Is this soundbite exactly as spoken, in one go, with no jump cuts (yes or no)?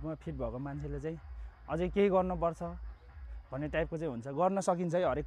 yes